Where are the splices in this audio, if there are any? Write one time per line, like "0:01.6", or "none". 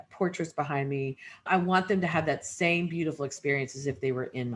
0:01.5